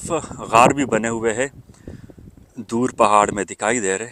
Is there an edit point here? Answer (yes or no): no